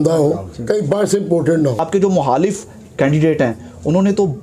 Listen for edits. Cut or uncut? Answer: cut